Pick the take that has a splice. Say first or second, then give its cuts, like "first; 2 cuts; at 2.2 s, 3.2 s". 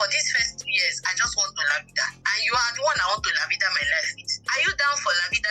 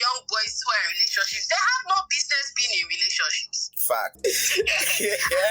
second; 1 cut; at 4.1 s